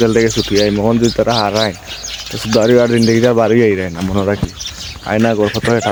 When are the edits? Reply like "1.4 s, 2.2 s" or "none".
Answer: none